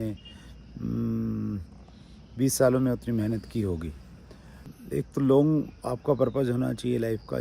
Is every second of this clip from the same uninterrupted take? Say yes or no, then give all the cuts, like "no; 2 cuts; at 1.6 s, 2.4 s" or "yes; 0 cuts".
no; 1 cut; at 4.6 s